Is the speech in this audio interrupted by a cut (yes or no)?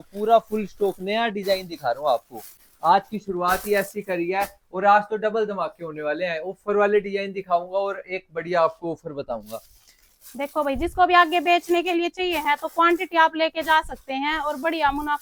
no